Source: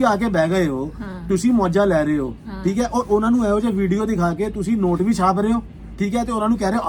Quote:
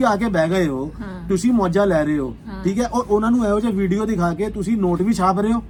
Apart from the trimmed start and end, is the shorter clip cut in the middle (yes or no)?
no